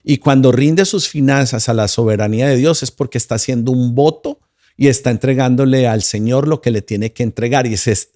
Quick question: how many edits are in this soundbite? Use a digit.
0